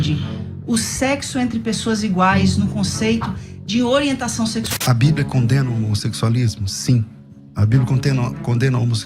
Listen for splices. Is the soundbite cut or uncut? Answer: cut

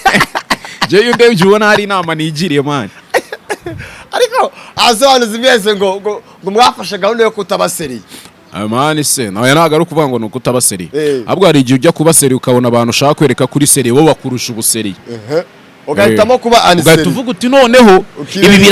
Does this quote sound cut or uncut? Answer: uncut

